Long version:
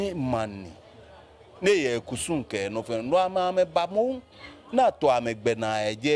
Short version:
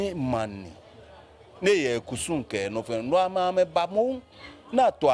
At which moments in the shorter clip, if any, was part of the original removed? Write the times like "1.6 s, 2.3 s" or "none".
none